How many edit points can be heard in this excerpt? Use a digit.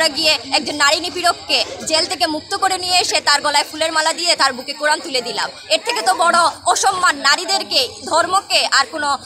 0